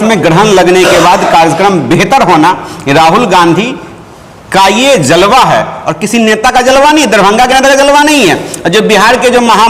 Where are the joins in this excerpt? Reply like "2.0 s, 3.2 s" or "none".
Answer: none

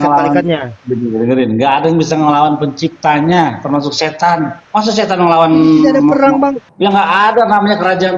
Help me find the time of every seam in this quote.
4.6 s, 6.7 s

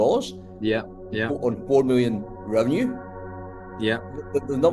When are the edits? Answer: none

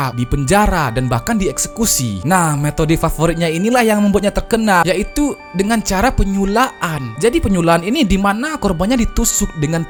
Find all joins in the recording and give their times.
none

